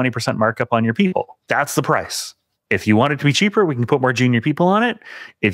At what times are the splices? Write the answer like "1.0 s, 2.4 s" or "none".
1.4 s